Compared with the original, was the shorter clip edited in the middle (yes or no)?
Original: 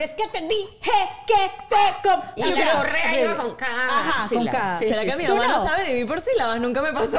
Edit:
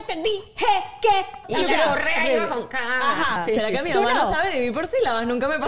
yes